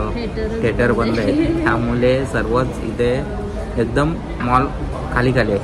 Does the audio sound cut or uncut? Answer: uncut